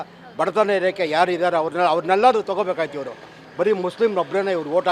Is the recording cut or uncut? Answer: uncut